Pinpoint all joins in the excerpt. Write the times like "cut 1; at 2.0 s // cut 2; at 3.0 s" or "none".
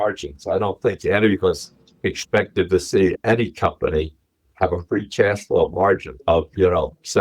cut 1; at 6.1 s